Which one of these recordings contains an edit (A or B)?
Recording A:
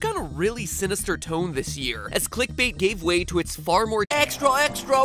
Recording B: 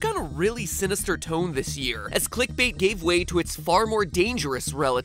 B